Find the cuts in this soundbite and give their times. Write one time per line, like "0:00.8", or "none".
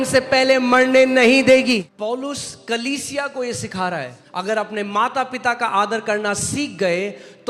0:01.9
0:04.2